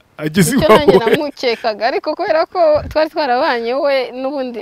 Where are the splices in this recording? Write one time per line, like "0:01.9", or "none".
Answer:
none